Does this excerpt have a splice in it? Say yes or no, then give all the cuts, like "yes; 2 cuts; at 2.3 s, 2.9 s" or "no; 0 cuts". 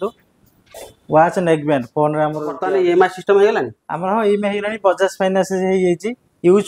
yes; 1 cut; at 2.6 s